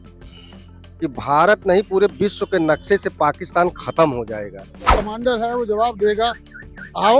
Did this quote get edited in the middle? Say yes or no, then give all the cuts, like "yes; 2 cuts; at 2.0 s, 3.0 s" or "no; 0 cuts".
yes; 1 cut; at 4.8 s